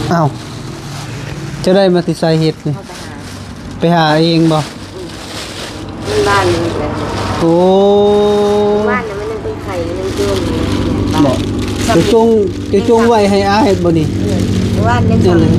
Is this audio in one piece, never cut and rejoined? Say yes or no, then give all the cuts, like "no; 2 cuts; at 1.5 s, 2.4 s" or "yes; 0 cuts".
yes; 0 cuts